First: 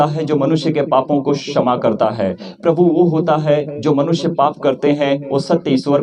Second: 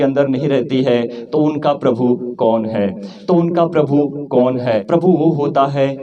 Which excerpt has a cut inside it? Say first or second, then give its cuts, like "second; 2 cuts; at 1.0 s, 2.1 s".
second; 1 cut; at 4.8 s